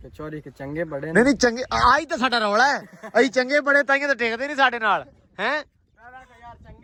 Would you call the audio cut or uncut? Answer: uncut